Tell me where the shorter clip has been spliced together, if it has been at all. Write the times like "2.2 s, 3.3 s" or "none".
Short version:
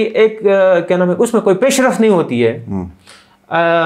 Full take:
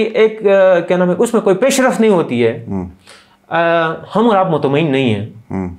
none